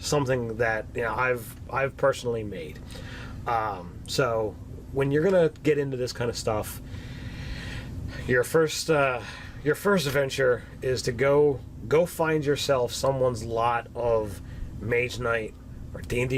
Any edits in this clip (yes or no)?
yes